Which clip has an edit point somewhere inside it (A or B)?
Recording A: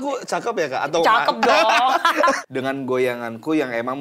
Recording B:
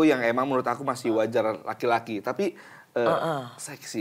A